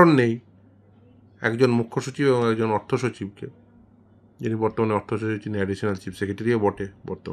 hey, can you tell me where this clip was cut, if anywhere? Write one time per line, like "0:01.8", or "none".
none